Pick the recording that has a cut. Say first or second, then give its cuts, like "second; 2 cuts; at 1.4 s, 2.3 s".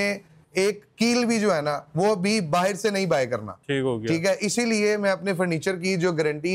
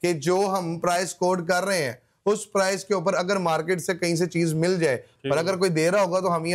second; 1 cut; at 5.1 s